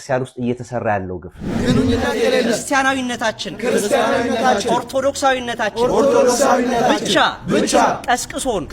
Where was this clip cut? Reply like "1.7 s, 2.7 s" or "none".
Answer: 1.6 s